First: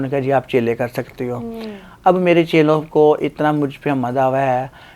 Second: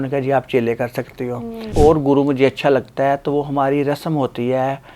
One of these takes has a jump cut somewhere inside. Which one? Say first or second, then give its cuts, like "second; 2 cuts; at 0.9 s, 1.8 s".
second; 1 cut; at 1.7 s